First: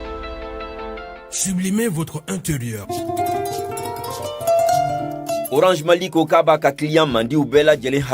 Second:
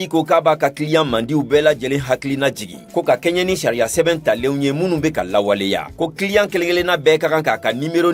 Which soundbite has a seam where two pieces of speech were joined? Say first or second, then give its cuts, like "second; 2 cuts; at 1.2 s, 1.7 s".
first; 1 cut; at 2.8 s